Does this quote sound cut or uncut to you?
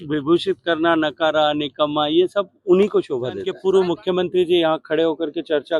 cut